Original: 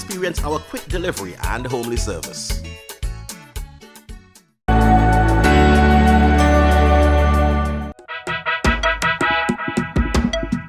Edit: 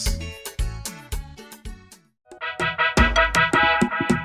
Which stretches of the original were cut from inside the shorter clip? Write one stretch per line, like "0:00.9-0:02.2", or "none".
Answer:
0:04.6-0:07.8

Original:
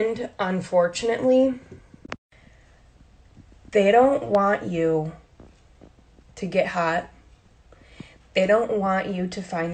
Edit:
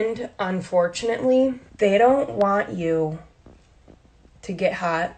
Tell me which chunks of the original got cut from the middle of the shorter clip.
0:01.7-0:03.6

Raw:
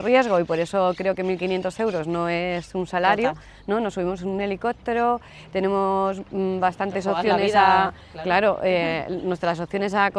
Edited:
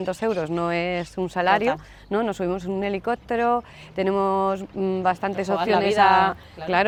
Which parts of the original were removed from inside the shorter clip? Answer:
none

